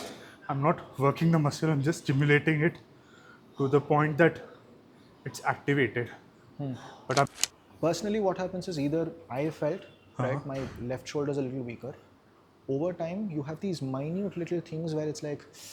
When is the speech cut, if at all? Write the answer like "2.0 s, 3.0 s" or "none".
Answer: 7.3 s